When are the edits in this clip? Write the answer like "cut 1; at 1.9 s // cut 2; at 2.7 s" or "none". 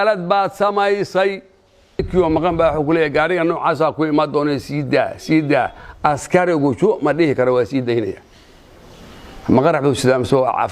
cut 1; at 2.1 s